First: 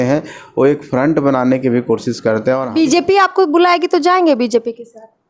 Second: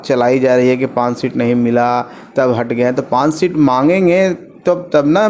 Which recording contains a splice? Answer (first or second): first